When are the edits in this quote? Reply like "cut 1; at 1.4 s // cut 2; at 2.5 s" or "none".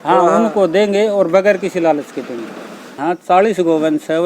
cut 1; at 3.0 s